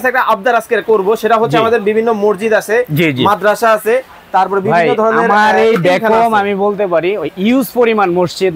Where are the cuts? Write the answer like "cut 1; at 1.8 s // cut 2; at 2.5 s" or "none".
none